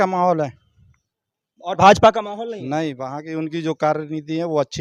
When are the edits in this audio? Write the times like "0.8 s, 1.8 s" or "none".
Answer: none

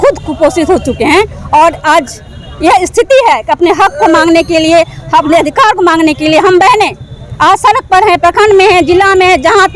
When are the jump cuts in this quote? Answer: none

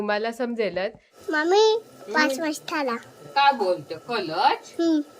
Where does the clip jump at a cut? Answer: 1.1 s

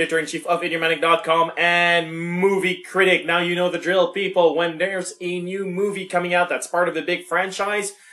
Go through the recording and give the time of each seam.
none

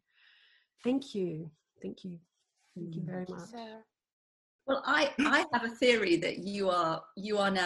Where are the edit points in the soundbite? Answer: 4.3 s

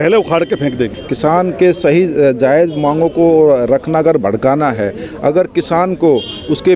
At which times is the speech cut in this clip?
1.0 s

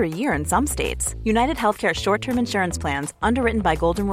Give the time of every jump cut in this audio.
none

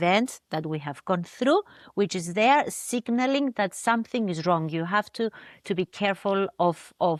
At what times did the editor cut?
none

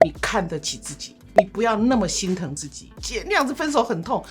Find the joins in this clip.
2.9 s

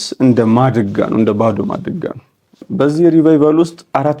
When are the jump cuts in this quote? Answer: 2.6 s

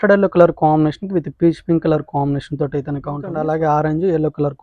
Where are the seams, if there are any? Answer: 3.3 s

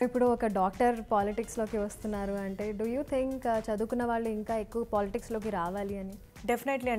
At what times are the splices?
none

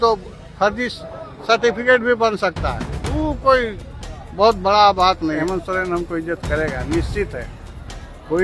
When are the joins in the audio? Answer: 5.4 s

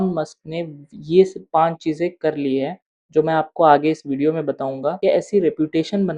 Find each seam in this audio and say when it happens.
none

